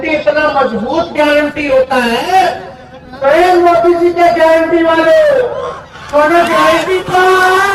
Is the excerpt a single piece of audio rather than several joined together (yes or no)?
yes